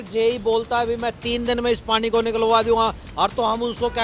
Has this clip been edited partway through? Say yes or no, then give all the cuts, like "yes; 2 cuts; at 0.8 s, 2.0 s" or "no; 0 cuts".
no; 0 cuts